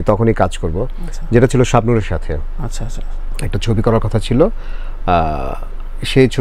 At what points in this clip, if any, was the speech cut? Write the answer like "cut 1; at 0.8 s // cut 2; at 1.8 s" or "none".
none